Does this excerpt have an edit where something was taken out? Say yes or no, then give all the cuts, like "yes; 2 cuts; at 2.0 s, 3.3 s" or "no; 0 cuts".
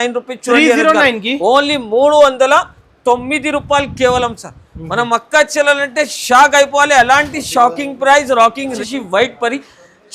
yes; 1 cut; at 8.8 s